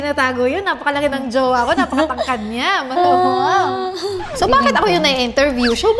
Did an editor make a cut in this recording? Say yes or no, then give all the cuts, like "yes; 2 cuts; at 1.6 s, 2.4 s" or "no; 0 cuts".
no; 0 cuts